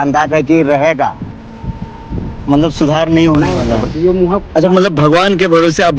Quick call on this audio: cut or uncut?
cut